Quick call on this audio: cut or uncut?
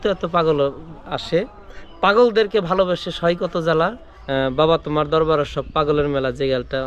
cut